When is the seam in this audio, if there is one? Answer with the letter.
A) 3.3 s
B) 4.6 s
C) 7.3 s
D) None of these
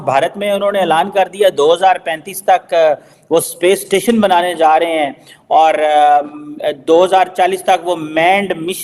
D